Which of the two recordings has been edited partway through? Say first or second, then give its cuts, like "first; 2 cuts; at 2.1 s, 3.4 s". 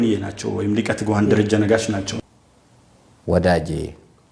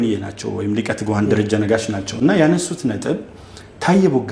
first; 1 cut; at 2.1 s